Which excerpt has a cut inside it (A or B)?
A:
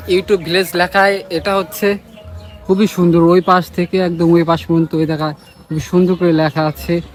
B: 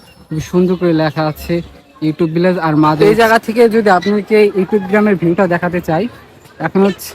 B